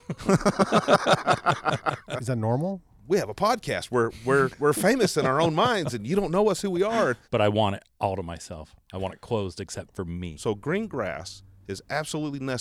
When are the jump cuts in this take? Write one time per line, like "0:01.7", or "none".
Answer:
0:02.4
0:07.2
0:10.3